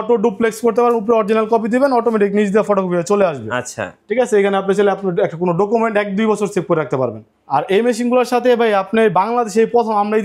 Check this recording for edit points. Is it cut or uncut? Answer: cut